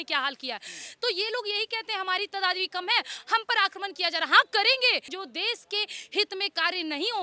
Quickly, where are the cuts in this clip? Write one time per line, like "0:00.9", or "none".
0:05.2